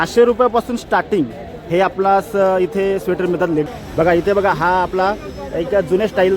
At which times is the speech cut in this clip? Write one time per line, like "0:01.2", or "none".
0:03.7